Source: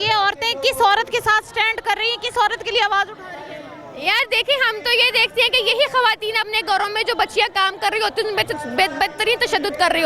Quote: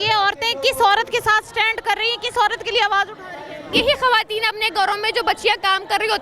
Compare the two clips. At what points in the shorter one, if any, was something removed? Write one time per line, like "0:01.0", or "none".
0:03.7